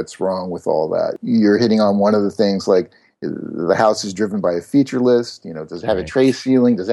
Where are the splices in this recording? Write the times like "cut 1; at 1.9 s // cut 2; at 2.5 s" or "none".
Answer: cut 1; at 1.2 s

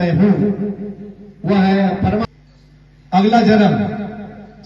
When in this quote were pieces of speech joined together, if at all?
cut 1; at 2.3 s

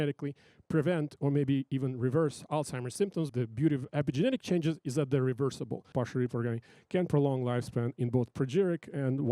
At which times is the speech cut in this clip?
cut 1; at 3.3 s // cut 2; at 5.9 s

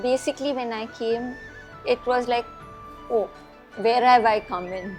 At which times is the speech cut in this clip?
none

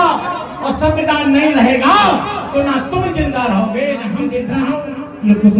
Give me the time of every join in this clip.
cut 1; at 4.4 s

